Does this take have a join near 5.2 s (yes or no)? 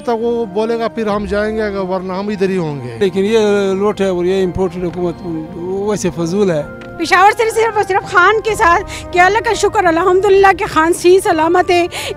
no